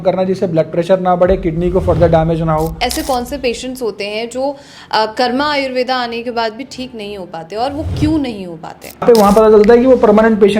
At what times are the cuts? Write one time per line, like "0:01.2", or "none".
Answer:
0:02.9
0:09.0